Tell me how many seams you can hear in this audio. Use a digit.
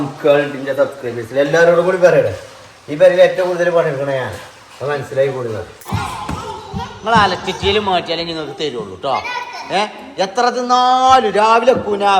1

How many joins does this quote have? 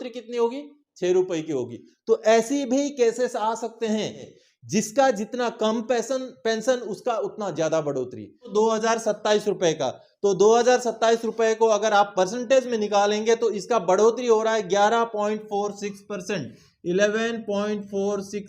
2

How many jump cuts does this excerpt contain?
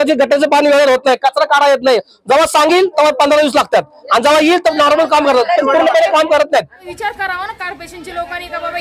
1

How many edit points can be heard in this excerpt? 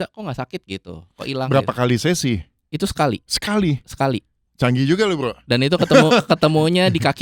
0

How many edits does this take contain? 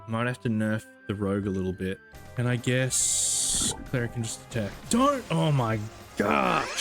1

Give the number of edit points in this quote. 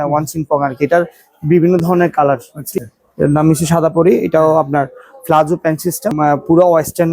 2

